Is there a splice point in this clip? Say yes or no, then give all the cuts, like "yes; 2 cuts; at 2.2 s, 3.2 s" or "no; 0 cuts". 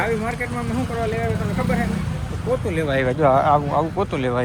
no; 0 cuts